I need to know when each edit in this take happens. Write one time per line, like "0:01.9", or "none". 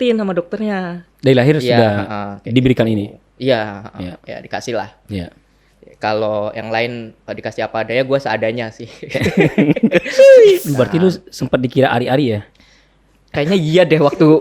0:01.0
0:10.6